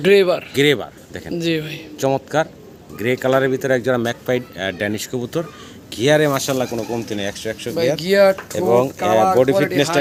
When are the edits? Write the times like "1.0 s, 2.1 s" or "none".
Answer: none